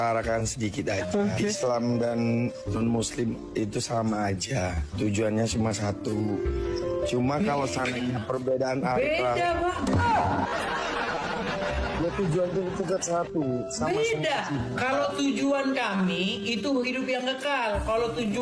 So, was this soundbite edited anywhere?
no; 0 cuts

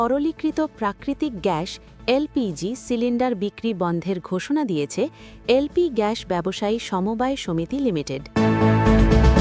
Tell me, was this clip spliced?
yes; 1 cut; at 8.3 s

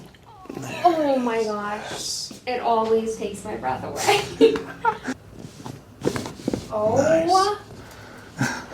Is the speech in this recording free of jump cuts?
no; 1 cut; at 5.2 s

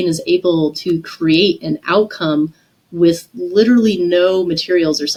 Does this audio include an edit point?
no; 0 cuts

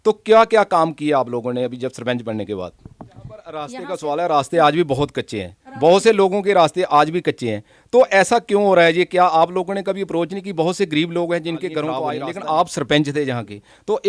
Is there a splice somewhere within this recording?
yes; 2 cuts; at 3.5 s, 12.0 s

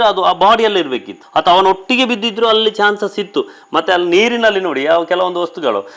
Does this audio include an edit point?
no; 0 cuts

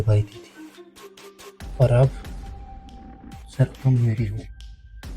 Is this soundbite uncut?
no; 2 cuts; at 2.2 s, 3.6 s

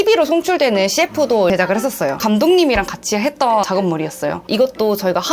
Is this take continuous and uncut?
no; 2 cuts; at 2.2 s, 4.5 s

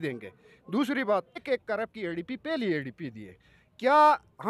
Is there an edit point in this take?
yes; 1 cut; at 1.4 s

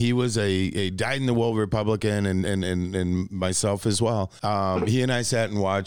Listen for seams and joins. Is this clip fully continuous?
no; 1 cut; at 4.3 s

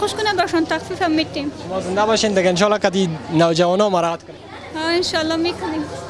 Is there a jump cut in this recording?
no; 0 cuts

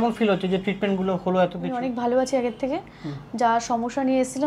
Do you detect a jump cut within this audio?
yes; 1 cut; at 1.6 s

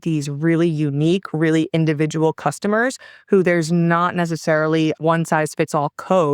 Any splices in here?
no; 0 cuts

